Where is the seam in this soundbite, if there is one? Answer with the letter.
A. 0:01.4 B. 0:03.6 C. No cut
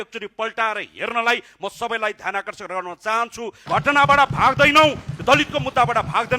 B